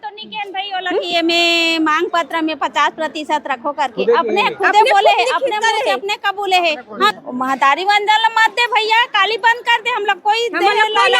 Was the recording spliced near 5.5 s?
no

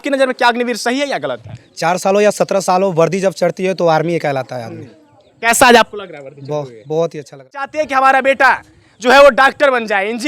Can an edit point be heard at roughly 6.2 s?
no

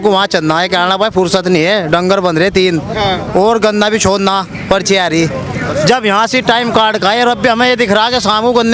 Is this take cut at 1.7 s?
no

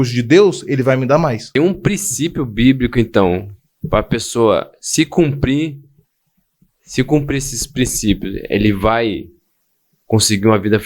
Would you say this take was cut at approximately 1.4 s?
yes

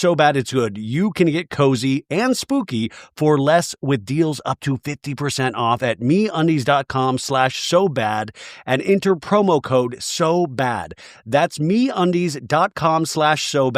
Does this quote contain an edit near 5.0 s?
no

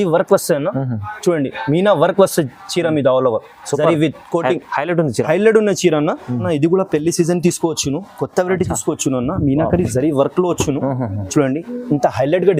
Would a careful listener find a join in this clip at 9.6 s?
no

